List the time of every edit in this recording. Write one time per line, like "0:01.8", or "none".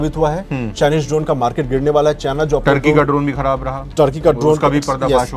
none